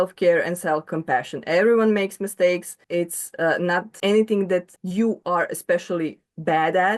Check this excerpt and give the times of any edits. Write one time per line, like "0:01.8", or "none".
0:00.9
0:02.7
0:03.9
0:04.8